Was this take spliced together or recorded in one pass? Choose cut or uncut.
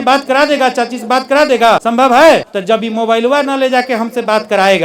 cut